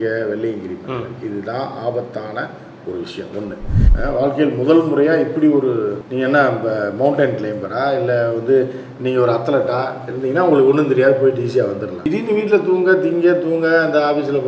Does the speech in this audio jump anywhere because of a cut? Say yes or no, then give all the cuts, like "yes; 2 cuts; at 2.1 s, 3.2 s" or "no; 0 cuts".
yes; 1 cut; at 3.8 s